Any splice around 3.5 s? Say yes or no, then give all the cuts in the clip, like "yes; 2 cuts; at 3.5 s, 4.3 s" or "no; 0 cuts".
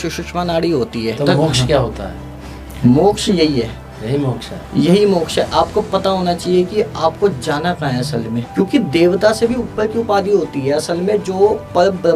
no; 2 cuts; at 1.2 s, 8.5 s